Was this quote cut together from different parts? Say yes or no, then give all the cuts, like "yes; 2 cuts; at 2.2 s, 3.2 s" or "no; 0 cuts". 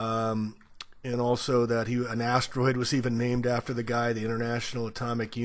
yes; 1 cut; at 1.4 s